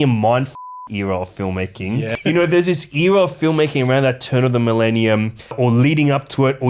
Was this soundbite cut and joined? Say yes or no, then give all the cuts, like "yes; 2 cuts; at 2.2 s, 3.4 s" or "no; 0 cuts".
yes; 1 cut; at 2.1 s